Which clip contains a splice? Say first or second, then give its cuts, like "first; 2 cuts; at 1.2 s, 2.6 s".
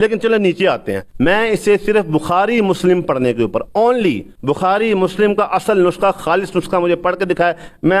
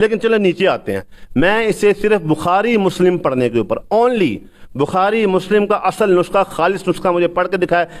first; 2 cuts; at 1.0 s, 4.3 s